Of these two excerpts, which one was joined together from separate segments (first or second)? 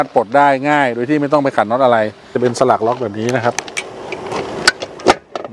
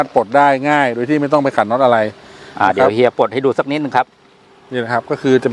first